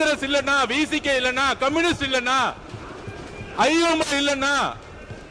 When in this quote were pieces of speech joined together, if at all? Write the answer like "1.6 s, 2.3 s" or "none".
none